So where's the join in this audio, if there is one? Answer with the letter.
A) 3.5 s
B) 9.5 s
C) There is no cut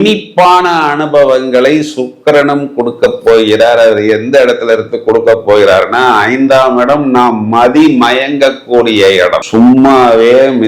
B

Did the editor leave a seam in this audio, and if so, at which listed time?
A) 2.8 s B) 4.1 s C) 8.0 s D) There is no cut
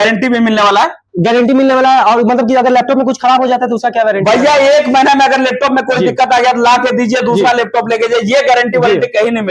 D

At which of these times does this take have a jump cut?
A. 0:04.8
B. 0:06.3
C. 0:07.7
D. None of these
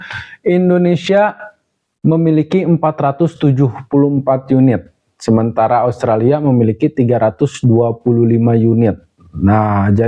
D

